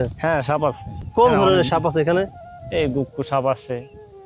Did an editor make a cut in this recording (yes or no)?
yes